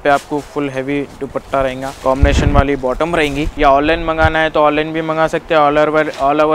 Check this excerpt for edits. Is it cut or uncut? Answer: cut